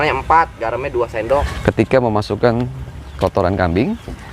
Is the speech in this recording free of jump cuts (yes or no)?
no